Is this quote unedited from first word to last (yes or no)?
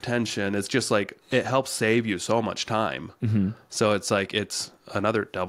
no